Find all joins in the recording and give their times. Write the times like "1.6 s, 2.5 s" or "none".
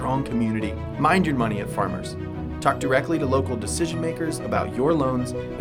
none